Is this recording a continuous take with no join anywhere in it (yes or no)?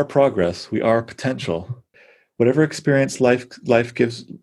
no